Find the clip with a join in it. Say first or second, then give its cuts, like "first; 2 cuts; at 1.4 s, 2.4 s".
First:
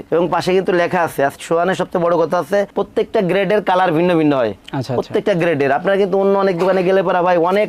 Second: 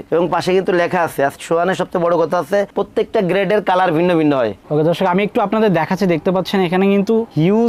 second; 1 cut; at 4.6 s